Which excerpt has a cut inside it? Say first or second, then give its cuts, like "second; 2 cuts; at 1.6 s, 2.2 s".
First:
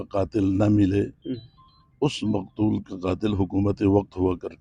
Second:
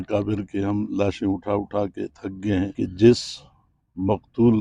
second; 1 cut; at 2.7 s